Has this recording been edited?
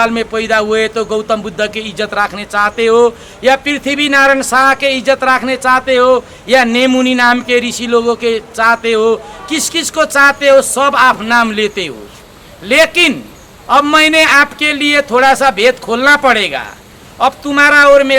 no; 0 cuts

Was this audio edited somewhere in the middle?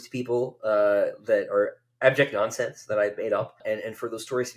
yes; 1 cut; at 3.6 s

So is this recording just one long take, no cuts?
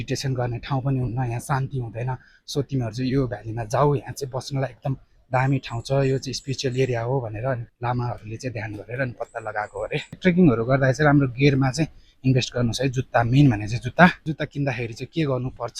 no; 3 cuts; at 7.7 s, 10.2 s, 14.2 s

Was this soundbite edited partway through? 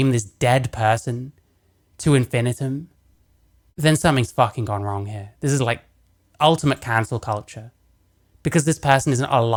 no; 0 cuts

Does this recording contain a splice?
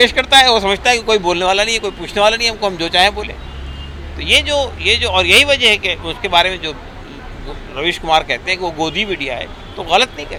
no; 0 cuts

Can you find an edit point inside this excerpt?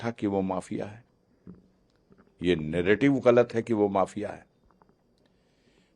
no; 0 cuts

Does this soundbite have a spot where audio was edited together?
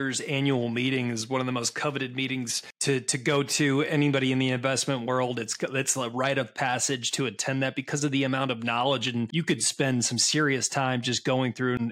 yes; 2 cuts; at 2.6 s, 9.3 s

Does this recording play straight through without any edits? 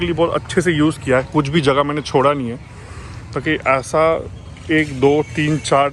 yes; 0 cuts

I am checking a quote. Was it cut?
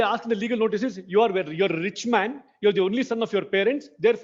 no; 0 cuts

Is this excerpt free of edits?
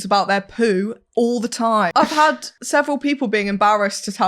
no; 2 cuts; at 1.9 s, 2.5 s

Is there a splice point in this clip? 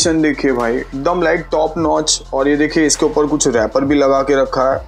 no; 0 cuts

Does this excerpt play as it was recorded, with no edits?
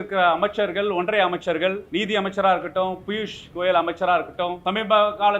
no; 2 cuts; at 1.8 s, 4.6 s

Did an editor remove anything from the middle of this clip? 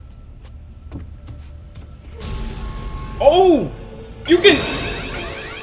no; 0 cuts

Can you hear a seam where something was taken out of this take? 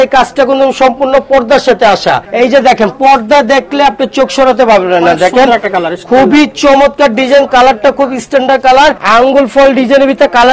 yes; 2 cuts; at 2.2 s, 9.0 s

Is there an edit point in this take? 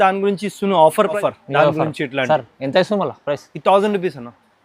yes; 1 cut; at 1.2 s

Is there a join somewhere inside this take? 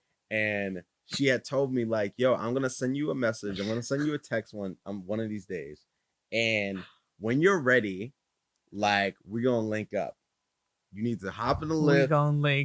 no; 0 cuts

